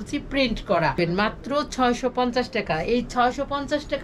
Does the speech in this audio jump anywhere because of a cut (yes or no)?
yes